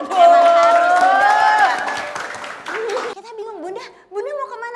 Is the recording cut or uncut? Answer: cut